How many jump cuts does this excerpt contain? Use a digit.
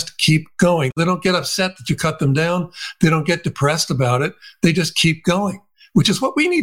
1